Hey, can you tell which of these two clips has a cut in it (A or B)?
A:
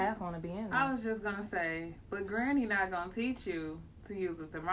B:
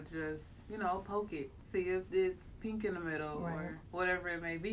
B